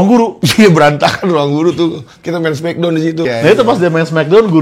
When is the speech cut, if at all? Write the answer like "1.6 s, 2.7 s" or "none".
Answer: 3.3 s